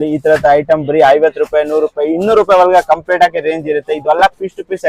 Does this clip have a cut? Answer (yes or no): no